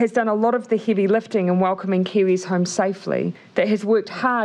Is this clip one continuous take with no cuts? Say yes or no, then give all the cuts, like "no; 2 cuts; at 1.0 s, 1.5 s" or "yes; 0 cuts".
no; 1 cut; at 3.4 s